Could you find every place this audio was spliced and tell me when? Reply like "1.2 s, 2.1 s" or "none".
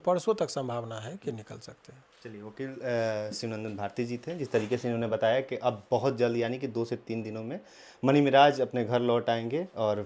none